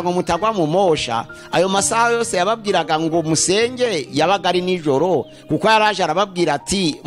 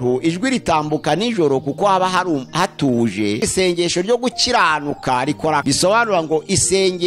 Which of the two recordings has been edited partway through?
second; 2 cuts; at 3.4 s, 5.6 s

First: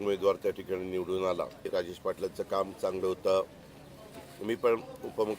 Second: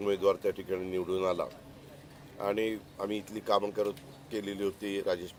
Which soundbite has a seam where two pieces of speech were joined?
first; 1 cut; at 1.7 s

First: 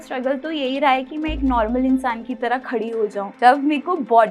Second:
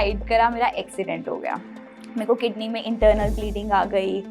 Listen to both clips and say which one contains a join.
first; 1 cut; at 3.2 s

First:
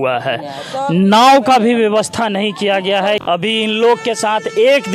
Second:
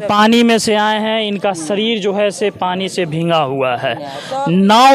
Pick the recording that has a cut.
first; 1 cut; at 3.2 s

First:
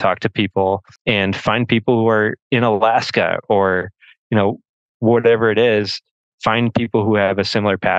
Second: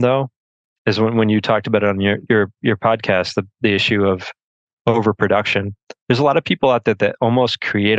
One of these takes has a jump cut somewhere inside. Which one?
first; 1 cut; at 0.9 s

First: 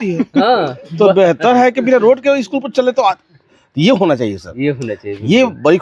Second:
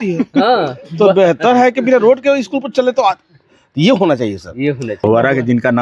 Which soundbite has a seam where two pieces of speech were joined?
second; 1 cut; at 4.9 s

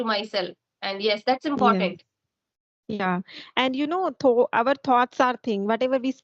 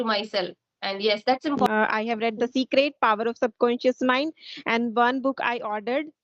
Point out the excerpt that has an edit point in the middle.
second; 1 cut; at 1.7 s

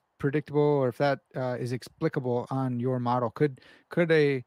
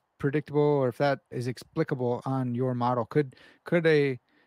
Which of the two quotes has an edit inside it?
second; 1 cut; at 1.3 s

